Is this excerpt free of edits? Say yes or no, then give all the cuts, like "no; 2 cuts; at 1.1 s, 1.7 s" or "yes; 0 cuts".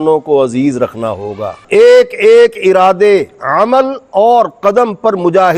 no; 1 cut; at 1.6 s